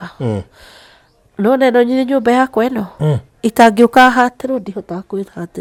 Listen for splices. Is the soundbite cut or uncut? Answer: uncut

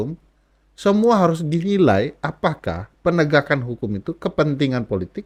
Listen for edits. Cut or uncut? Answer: uncut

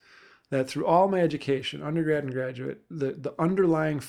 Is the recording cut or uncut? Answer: cut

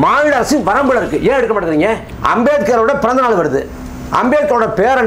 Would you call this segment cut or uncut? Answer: cut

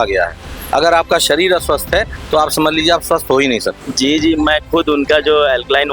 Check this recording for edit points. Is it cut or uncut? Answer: cut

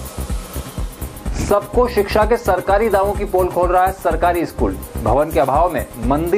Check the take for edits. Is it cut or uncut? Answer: cut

